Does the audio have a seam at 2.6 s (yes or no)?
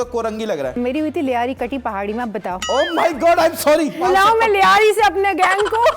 yes